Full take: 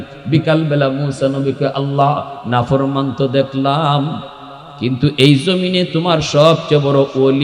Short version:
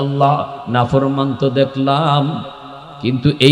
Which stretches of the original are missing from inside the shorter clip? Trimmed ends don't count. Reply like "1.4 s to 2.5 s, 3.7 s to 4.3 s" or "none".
none